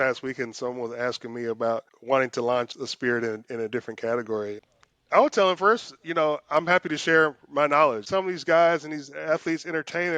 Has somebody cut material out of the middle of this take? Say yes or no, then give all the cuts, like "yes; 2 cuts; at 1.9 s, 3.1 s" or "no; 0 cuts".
yes; 4 cuts; at 1.9 s, 2.8 s, 4.6 s, 8.0 s